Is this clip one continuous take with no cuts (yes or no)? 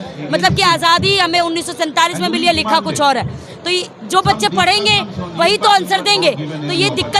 yes